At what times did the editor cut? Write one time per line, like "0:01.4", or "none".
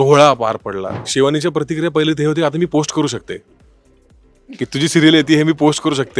0:01.0